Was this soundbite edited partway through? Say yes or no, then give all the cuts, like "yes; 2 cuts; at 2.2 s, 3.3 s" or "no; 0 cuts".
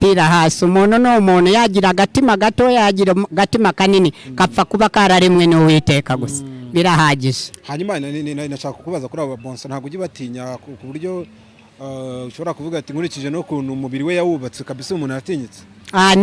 no; 0 cuts